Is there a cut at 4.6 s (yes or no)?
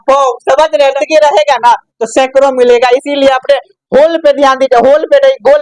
no